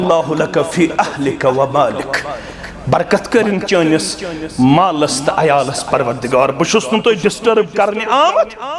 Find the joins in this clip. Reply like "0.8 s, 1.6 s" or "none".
none